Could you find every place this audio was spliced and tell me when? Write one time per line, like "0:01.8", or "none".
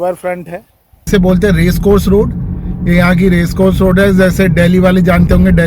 0:00.9